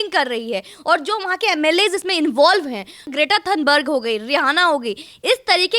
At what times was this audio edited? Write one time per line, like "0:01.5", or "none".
0:03.0